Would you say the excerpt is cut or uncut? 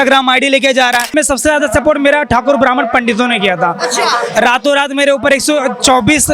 cut